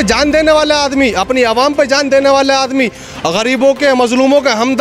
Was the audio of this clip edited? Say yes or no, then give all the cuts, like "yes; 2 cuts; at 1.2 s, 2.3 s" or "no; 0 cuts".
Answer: no; 0 cuts